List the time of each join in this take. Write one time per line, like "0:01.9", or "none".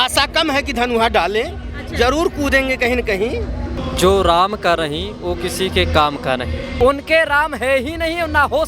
0:03.7
0:06.6